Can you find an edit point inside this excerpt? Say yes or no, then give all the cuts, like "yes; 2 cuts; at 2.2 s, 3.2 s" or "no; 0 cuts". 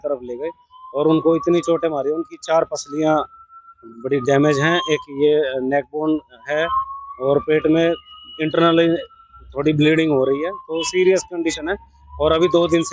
no; 0 cuts